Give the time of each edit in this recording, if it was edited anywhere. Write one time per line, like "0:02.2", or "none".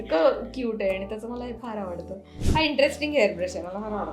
0:02.4